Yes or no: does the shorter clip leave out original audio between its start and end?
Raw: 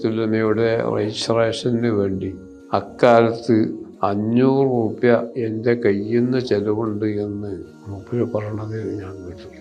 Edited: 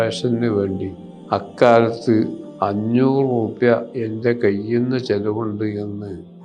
no